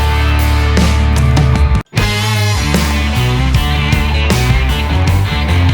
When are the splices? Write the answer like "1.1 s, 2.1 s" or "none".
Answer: 1.8 s